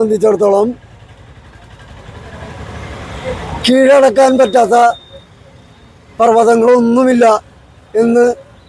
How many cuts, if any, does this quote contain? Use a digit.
0